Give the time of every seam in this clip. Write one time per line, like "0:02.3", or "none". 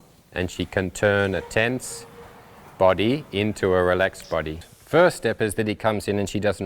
0:04.7